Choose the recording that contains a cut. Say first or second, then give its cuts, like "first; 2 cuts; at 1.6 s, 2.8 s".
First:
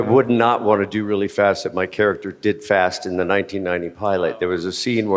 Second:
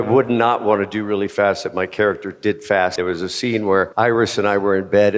second; 2 cuts; at 2.9 s, 3.9 s